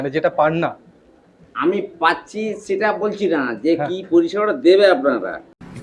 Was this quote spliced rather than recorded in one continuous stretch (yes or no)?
no